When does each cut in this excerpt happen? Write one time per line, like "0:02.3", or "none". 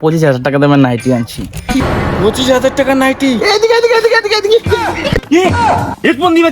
0:01.8
0:05.2

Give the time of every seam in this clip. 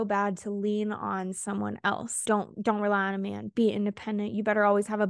0:02.2

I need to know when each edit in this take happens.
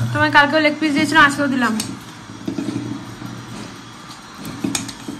none

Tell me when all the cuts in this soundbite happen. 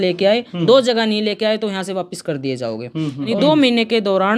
0:03.3

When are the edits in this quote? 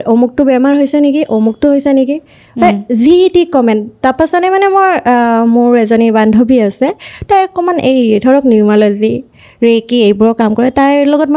none

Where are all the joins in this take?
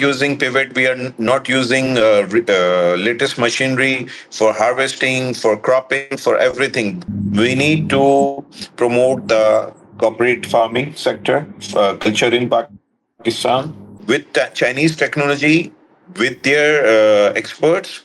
0:07.0
0:13.9

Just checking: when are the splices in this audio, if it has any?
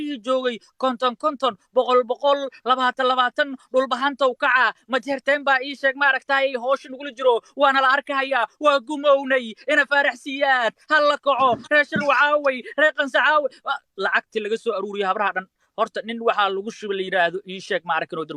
none

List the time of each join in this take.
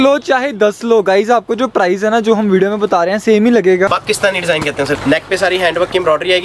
0:03.9
0:05.0

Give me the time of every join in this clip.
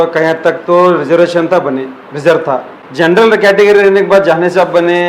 0:02.8

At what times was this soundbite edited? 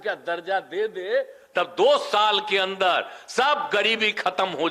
none

